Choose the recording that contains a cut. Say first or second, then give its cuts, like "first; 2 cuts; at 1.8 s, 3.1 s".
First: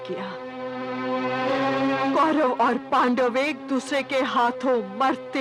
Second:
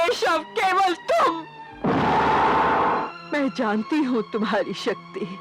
second; 1 cut; at 3.0 s